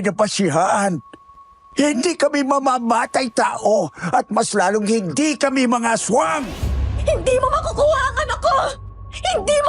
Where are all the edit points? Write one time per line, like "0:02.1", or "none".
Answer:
0:06.6

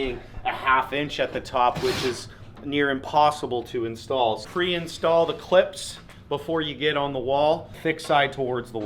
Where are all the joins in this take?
0:04.4
0:07.7

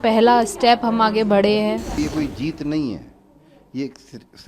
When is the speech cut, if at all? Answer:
0:01.9

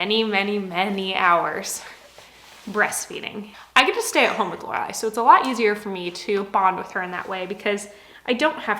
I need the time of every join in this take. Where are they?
0:03.5

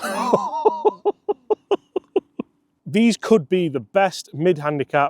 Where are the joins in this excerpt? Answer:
0:02.7

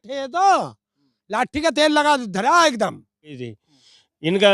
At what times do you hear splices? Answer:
0:03.5

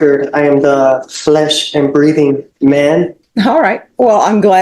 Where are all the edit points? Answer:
0:03.2

